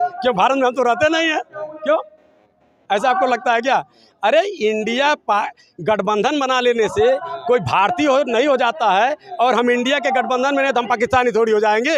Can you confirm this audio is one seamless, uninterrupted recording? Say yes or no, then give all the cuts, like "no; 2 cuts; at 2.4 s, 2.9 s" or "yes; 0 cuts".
yes; 0 cuts